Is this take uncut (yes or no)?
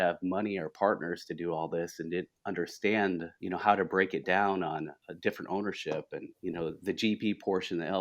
no